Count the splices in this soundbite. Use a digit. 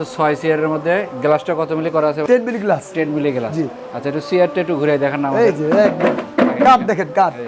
0